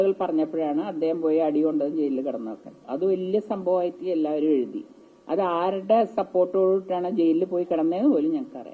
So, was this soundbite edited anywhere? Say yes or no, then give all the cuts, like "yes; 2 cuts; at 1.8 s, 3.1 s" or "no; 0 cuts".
no; 0 cuts